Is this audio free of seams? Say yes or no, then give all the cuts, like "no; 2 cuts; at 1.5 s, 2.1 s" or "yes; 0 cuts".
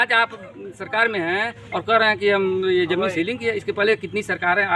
yes; 0 cuts